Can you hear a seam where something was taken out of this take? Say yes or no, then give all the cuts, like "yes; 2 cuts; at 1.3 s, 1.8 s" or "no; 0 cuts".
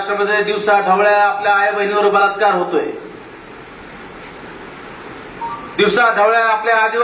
no; 0 cuts